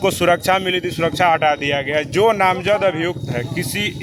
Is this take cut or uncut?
uncut